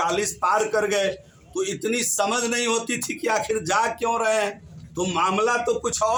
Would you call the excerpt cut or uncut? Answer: uncut